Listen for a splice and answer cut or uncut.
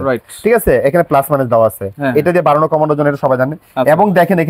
uncut